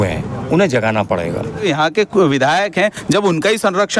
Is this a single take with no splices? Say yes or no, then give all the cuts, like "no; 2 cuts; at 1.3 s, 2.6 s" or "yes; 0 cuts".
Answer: no; 1 cut; at 1.6 s